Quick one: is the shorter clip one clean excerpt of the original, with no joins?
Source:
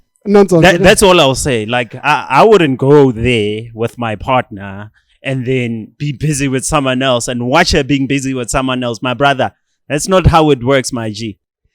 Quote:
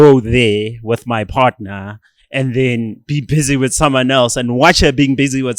yes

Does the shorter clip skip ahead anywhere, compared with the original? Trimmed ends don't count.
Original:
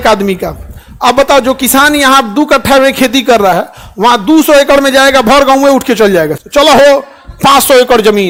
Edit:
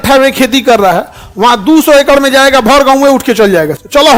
no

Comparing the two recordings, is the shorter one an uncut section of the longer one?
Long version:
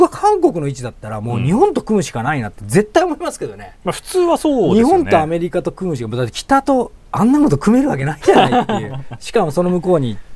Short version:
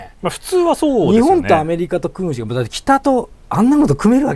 yes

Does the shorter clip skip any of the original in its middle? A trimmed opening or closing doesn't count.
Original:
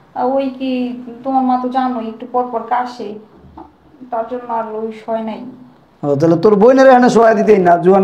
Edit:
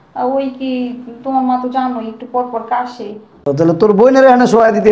yes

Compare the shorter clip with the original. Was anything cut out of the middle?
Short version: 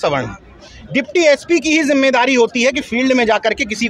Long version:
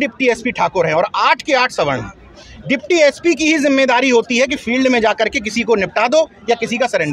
no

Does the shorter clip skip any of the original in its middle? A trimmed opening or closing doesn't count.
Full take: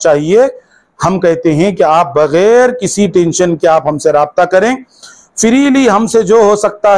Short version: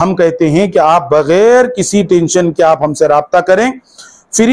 no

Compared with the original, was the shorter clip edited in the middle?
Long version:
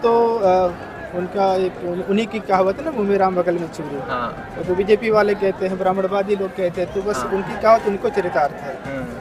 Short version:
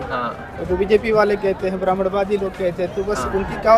no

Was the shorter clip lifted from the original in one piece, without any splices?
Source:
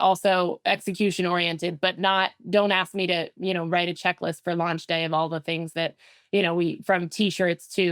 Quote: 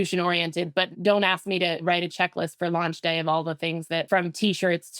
no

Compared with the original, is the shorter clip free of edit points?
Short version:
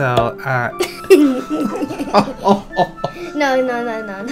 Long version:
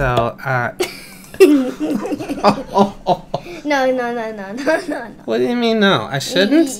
no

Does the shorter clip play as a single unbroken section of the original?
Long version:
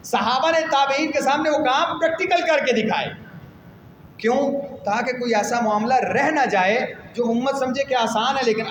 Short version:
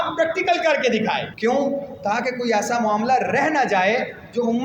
no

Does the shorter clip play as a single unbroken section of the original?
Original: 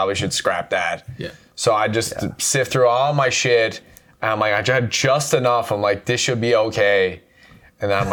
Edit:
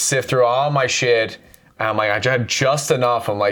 yes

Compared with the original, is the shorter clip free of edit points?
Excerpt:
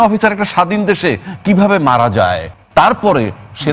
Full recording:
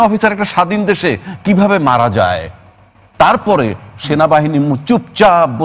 no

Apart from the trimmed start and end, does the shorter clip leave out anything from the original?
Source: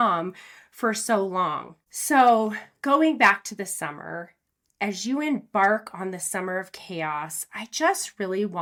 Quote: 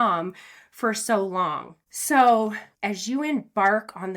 yes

